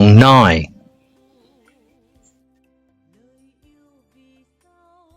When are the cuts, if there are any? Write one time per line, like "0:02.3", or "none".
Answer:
0:00.9